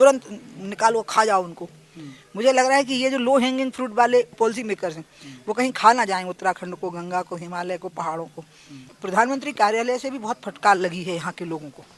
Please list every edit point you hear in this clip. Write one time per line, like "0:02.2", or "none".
0:04.4
0:08.9